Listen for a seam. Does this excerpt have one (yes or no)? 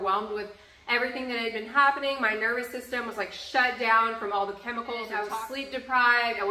yes